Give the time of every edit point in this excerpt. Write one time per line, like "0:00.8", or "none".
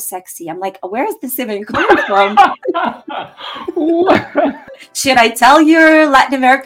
0:04.6